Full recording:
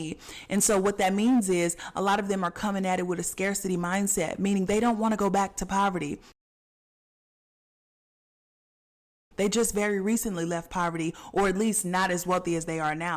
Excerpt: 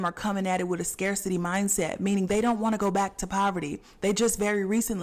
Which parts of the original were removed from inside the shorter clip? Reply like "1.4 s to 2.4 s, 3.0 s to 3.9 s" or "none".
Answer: 6.2 s to 9.2 s